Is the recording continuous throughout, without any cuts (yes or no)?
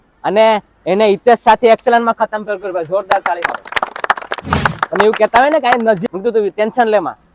no